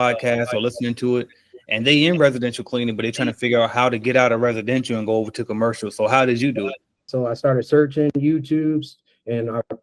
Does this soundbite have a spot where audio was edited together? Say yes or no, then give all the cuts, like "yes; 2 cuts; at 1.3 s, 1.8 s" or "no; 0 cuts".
yes; 1 cut; at 7.1 s